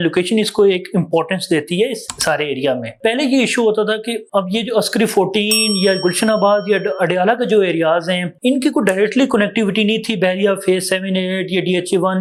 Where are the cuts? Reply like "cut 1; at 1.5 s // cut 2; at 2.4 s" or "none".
none